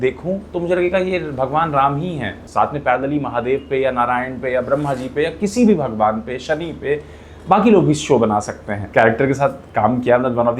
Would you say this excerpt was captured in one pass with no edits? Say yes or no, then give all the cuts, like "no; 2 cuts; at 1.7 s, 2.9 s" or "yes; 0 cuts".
no; 2 cuts; at 2.4 s, 8.7 s